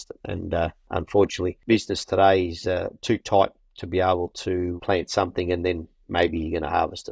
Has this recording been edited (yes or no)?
yes